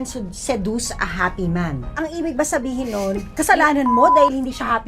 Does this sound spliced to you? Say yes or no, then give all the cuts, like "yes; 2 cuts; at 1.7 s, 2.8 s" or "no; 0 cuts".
yes; 1 cut; at 1.9 s